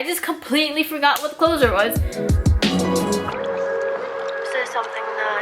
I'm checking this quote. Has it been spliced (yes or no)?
yes